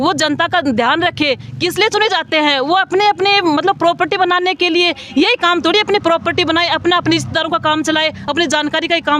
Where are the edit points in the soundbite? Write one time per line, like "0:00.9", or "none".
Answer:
none